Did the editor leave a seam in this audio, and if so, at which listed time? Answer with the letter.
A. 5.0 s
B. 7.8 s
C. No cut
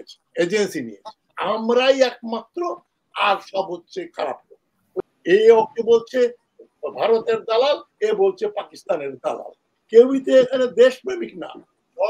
A